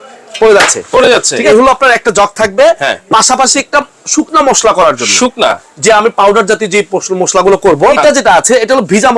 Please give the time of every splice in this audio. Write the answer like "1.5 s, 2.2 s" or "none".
1.5 s, 8.0 s